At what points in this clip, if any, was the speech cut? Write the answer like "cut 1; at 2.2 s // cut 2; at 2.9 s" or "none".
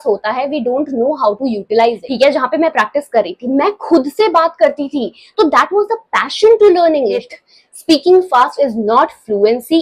cut 1; at 2.0 s // cut 2; at 7.3 s